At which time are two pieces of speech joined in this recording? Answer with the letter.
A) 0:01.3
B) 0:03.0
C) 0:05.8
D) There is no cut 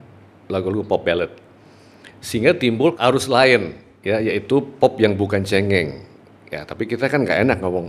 B